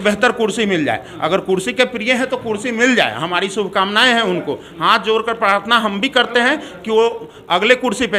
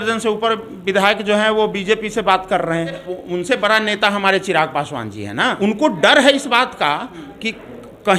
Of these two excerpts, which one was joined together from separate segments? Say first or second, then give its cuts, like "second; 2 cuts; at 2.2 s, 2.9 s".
second; 2 cuts; at 3.1 s, 5.6 s